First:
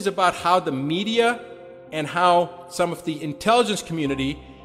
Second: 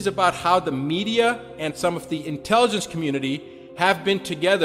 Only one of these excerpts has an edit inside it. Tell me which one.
second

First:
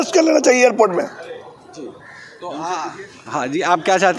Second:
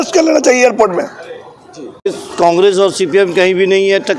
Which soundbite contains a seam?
second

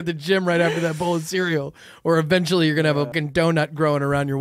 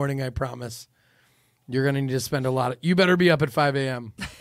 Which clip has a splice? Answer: first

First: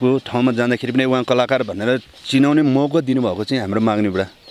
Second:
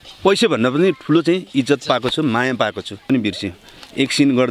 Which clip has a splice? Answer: second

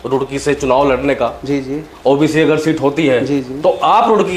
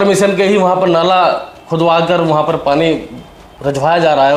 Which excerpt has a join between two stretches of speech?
second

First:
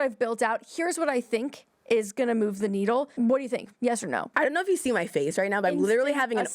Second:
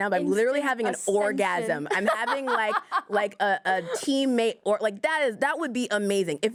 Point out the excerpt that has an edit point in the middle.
first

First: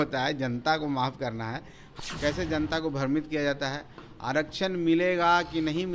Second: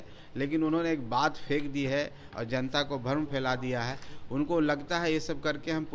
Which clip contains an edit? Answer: first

